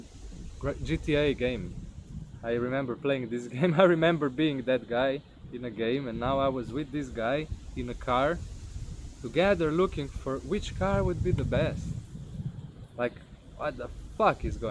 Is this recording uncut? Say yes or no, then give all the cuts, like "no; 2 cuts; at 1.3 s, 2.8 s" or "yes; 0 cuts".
yes; 0 cuts